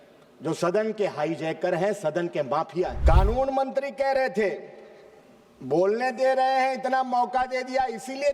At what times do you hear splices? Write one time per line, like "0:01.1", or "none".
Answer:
0:03.0